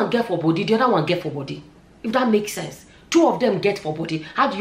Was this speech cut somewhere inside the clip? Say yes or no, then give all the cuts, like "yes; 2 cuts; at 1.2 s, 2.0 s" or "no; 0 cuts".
no; 0 cuts